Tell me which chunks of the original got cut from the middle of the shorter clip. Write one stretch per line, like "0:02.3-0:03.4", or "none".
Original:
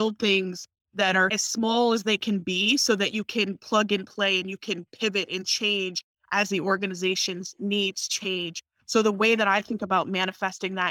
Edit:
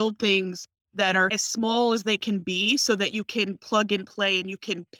none